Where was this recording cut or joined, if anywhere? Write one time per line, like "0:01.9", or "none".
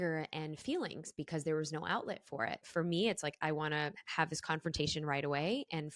0:02.6